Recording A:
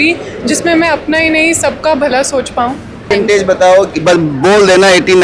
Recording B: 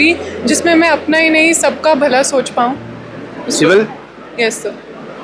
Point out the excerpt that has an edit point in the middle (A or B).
A